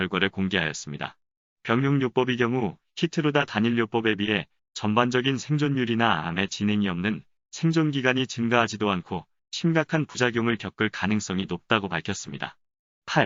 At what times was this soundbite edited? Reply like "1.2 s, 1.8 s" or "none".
none